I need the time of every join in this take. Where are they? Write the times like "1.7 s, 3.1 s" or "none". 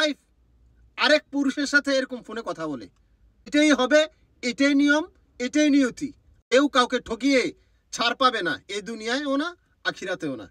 3.5 s, 6.3 s